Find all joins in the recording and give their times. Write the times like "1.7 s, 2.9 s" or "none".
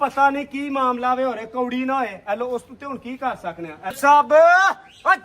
4.0 s